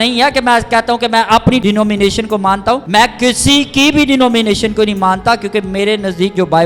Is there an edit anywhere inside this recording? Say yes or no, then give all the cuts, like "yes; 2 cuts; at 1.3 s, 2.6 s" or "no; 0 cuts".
yes; 2 cuts; at 1.6 s, 2.8 s